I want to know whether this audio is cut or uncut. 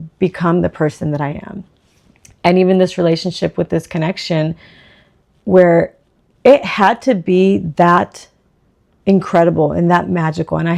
uncut